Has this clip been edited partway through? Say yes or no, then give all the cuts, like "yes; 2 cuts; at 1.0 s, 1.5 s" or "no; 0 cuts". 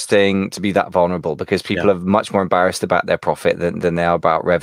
no; 0 cuts